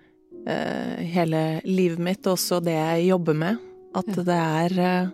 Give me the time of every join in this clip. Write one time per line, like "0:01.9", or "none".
none

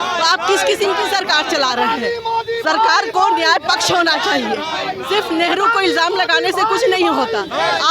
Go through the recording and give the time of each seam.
none

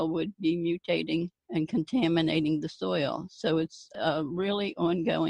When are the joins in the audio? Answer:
0:01.4
0:03.9

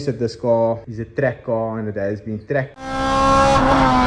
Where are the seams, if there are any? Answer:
0:00.9
0:02.8

